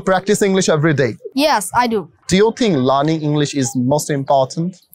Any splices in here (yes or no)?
yes